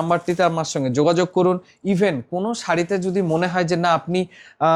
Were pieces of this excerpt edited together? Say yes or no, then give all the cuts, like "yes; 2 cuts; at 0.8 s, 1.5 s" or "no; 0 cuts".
no; 0 cuts